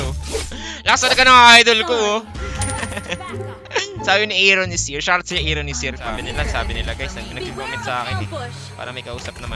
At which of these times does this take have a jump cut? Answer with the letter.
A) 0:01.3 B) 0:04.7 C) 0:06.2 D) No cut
C